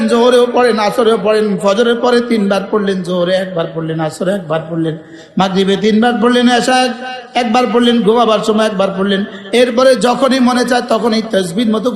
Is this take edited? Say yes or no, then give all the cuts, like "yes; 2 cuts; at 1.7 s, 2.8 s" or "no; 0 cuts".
no; 0 cuts